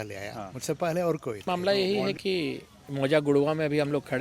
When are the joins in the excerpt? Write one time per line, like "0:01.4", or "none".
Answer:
0:01.5